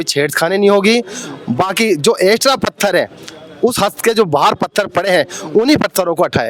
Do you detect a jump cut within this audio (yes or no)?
no